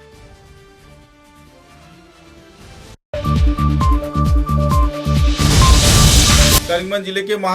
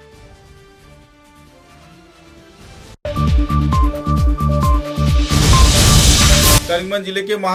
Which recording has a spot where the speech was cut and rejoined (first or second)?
first